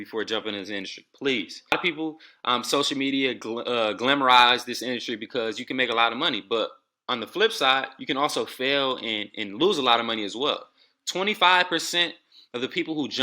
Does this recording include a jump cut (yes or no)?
yes